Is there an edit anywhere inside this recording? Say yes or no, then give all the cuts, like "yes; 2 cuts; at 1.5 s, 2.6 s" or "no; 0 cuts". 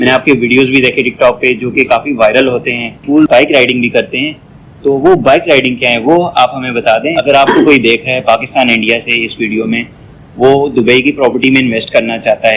yes; 2 cuts; at 3.0 s, 7.1 s